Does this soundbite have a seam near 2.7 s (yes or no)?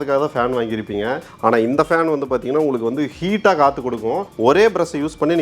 no